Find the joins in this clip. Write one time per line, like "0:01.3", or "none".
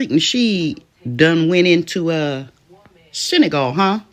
none